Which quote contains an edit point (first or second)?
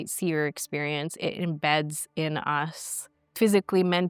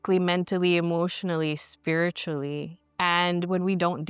second